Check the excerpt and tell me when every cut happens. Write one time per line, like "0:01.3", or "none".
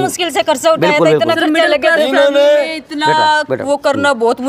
none